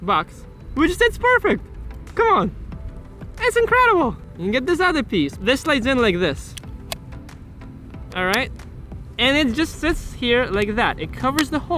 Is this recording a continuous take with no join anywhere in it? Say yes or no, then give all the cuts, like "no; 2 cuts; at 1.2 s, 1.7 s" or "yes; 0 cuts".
no; 1 cut; at 4.3 s